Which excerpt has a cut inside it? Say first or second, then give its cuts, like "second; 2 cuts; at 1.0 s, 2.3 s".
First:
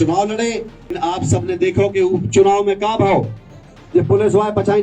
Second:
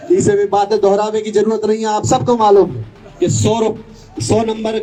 first; 1 cut; at 0.9 s